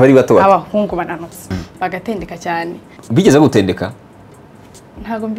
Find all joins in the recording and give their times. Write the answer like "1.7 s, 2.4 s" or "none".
1.5 s, 2.9 s